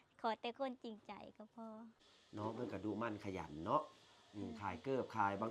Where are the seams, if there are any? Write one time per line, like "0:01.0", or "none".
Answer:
0:01.9